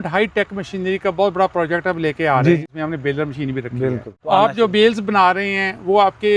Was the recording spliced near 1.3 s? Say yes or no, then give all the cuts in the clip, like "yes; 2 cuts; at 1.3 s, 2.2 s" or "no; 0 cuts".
no; 2 cuts; at 2.6 s, 4.1 s